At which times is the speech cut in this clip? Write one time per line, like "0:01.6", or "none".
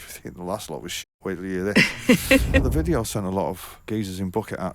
0:02.6
0:03.8